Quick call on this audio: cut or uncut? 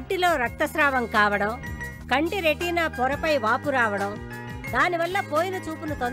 uncut